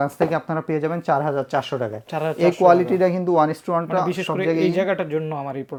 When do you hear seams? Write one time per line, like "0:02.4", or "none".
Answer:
none